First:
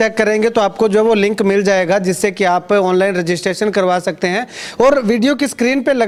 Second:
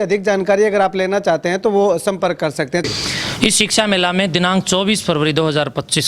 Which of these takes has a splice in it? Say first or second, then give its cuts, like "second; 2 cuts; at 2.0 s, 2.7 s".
second; 1 cut; at 2.8 s